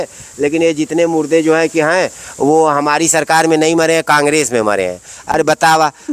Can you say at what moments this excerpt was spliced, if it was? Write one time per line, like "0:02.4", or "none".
none